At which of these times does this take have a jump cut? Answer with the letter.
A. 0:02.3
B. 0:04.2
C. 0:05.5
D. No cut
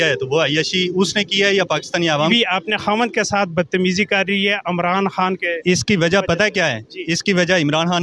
A